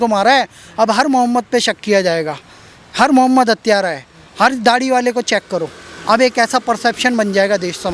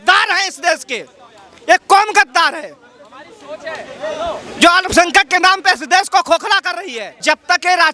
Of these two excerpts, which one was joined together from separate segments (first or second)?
second